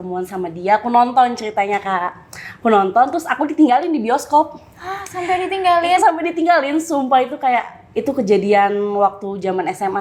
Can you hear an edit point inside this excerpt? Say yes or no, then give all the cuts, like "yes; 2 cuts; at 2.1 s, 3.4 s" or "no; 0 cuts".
no; 0 cuts